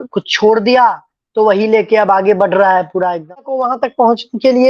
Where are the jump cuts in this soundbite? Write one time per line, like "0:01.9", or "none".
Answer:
0:03.6